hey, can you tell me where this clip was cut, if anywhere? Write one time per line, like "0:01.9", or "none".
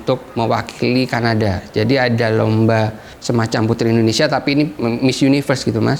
none